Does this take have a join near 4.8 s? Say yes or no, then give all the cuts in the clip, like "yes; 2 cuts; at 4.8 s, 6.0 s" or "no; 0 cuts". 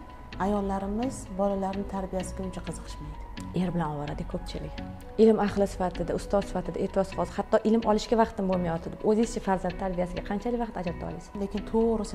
yes; 2 cuts; at 4.8 s, 11.3 s